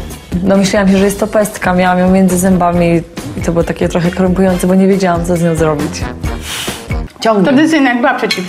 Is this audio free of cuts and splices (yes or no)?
no